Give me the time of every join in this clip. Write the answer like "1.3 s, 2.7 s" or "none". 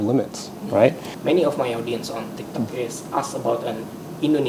1.1 s